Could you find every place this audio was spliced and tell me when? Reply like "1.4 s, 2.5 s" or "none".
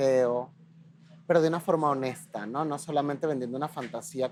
none